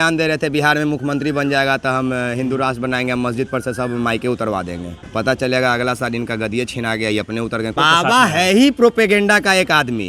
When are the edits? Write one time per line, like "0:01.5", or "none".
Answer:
0:05.0
0:07.8